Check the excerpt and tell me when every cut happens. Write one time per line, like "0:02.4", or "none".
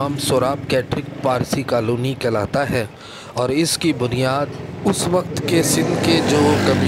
none